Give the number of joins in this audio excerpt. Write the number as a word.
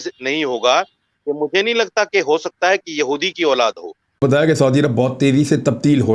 one